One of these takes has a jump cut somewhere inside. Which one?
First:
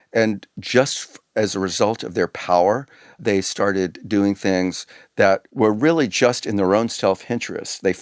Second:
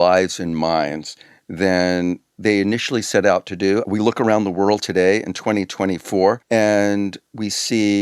second; 2 cuts; at 3.8 s, 6.4 s

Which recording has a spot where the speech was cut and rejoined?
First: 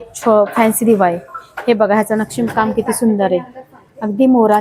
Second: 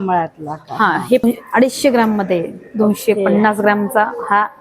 second; 1 cut; at 1.2 s

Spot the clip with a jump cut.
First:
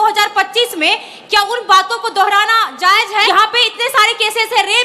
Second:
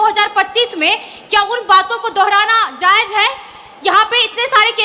first; 1 cut; at 3.3 s

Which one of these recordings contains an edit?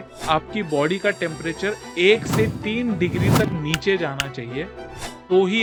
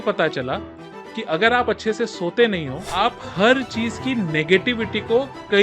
second; 1 cut; at 2.8 s

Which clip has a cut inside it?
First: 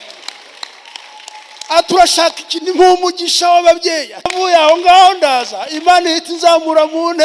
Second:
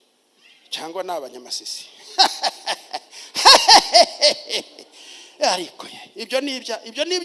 first; 1 cut; at 4.3 s

